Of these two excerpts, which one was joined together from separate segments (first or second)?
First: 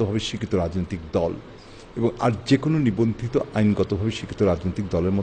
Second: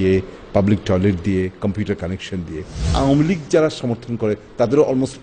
second